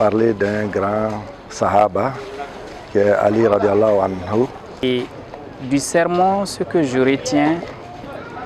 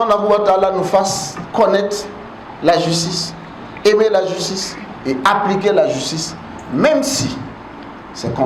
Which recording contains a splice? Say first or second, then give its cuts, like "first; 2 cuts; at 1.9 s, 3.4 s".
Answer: first; 1 cut; at 4.8 s